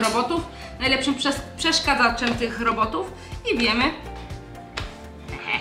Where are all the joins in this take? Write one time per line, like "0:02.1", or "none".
none